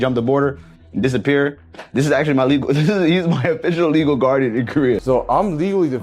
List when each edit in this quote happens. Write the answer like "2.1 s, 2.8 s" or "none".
5.0 s